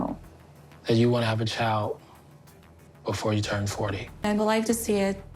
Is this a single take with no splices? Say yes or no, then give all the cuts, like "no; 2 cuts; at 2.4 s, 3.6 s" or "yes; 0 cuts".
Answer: no; 1 cut; at 4.2 s